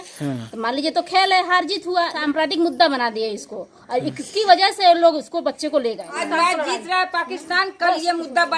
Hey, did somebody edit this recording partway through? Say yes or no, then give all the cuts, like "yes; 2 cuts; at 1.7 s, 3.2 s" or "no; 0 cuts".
yes; 2 cuts; at 2.2 s, 6.2 s